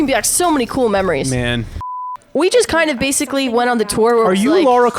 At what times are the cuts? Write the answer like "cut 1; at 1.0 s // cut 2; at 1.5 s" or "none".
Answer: cut 1; at 2.0 s